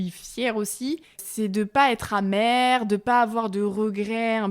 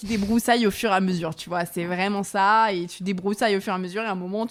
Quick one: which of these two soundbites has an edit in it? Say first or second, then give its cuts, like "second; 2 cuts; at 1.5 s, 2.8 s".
first; 1 cut; at 1.2 s